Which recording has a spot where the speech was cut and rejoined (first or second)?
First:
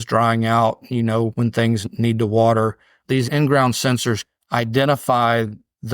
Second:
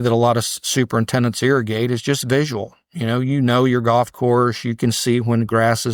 first